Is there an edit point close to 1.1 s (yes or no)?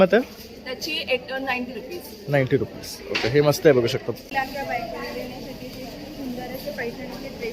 no